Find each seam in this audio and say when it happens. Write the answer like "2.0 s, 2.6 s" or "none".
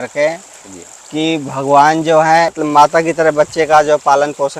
2.5 s